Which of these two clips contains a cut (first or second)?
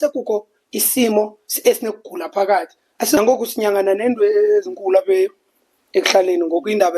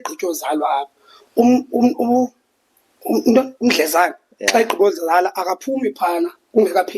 first